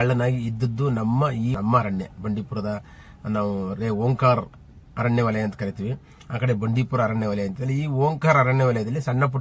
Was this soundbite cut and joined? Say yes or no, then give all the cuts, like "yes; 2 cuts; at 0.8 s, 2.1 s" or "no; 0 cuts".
yes; 1 cut; at 1.6 s